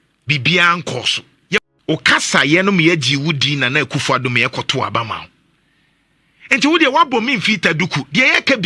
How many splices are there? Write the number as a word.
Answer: one